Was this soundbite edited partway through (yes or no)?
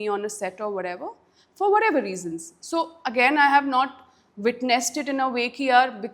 no